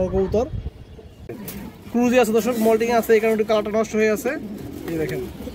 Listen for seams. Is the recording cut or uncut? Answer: cut